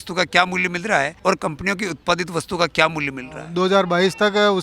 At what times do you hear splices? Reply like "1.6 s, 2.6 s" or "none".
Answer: 1.1 s, 3.4 s